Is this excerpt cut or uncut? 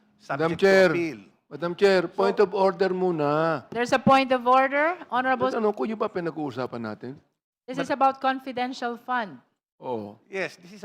cut